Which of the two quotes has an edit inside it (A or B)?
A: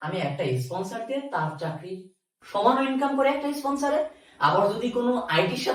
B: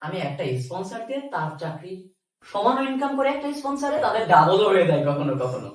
B